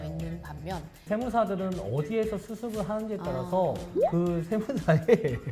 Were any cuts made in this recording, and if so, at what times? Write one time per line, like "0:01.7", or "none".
0:01.1